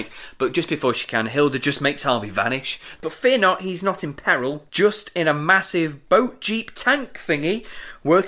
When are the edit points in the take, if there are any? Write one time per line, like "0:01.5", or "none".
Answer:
0:03.0
0:04.6